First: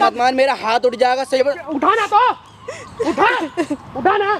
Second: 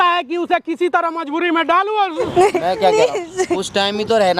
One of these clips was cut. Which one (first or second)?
second